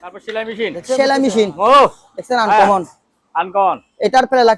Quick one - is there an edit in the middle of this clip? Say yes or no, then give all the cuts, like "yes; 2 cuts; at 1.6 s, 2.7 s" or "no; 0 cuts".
no; 0 cuts